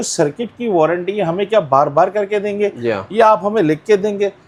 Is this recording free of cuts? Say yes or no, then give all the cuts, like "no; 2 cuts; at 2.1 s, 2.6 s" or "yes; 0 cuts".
yes; 0 cuts